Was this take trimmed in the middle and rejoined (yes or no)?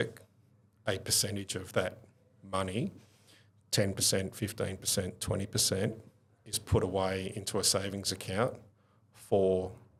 no